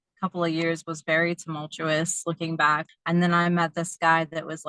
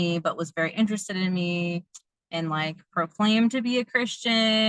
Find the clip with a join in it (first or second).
first